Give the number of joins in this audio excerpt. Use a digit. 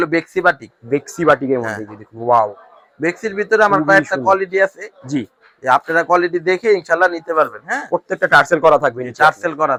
0